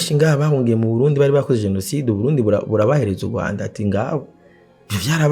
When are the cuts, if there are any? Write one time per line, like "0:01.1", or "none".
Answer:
none

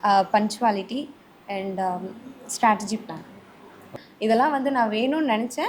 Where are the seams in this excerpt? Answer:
0:04.0

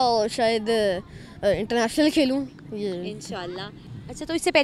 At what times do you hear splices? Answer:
none

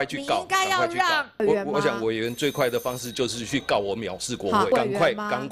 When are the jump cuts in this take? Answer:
0:01.4
0:04.7

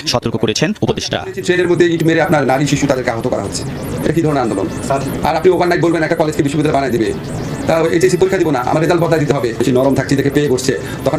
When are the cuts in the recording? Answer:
none

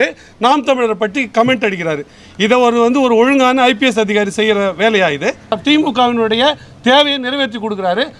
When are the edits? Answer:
0:05.5

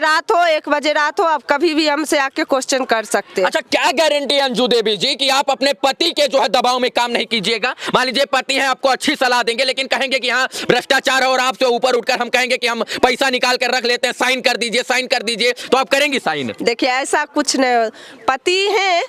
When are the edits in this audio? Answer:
none

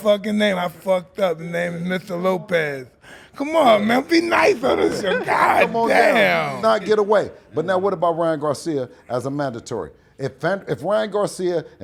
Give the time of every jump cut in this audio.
none

